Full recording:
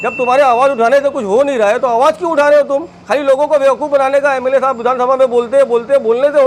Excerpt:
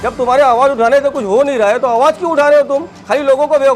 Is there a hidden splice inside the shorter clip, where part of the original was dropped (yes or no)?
no